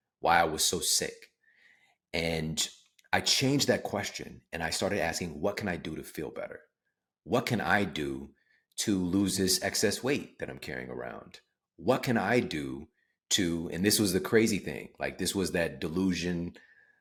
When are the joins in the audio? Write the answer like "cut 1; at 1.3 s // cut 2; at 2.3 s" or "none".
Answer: none